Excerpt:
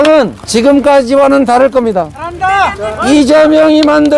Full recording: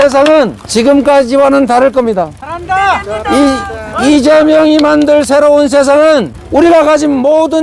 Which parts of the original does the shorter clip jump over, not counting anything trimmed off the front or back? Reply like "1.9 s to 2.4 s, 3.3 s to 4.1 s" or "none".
2.8 s to 3.5 s